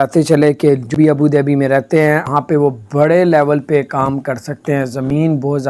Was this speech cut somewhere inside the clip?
yes; 2 cuts; at 0.9 s, 2.3 s

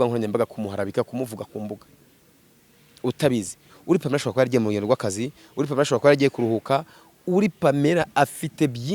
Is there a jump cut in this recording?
no; 0 cuts

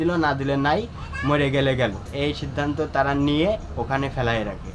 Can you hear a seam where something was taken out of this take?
yes; 1 cut; at 2.1 s

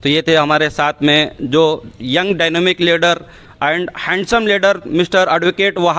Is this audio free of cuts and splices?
yes; 0 cuts

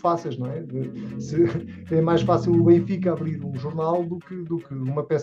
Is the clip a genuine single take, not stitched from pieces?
yes; 0 cuts

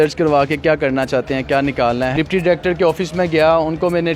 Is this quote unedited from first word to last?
no; 1 cut; at 2.1 s

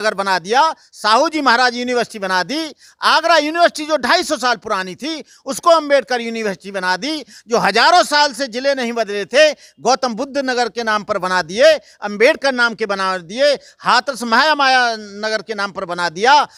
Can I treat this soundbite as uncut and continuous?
yes; 0 cuts

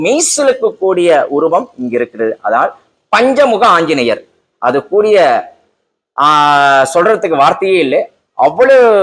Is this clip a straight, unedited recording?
yes; 0 cuts

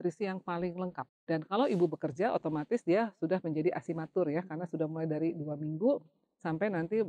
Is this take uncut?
no; 1 cut; at 1.1 s

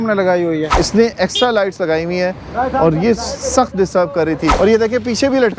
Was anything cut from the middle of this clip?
yes; 2 cuts; at 0.7 s, 4.5 s

